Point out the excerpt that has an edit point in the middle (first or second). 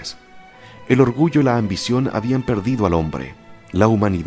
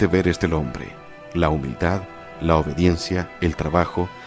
second